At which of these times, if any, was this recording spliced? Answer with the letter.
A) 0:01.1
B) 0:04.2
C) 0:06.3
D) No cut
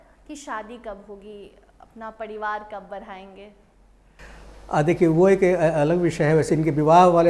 D